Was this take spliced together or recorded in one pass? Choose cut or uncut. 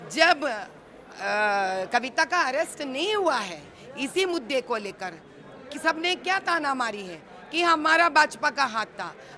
uncut